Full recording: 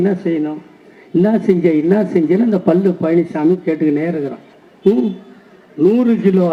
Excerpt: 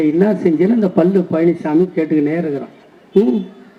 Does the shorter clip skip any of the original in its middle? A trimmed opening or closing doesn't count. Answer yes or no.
no